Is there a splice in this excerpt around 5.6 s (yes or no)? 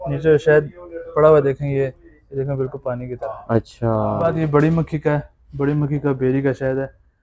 no